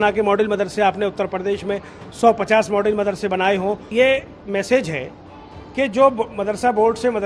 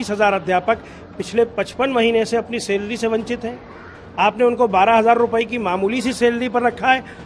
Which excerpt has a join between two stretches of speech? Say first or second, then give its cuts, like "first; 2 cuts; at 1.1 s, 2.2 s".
first; 1 cut; at 3.8 s